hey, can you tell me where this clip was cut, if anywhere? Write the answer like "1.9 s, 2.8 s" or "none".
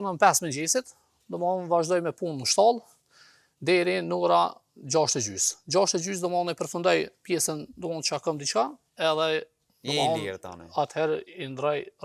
none